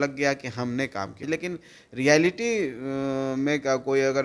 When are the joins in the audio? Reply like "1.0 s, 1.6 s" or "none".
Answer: 1.2 s